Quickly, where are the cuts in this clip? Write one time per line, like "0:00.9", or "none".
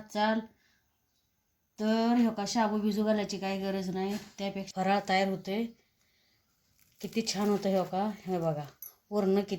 0:04.6